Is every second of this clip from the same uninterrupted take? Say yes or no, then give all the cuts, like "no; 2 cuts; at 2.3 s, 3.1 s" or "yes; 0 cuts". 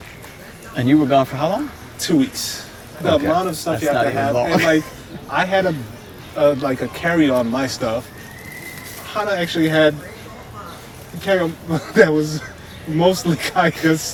yes; 0 cuts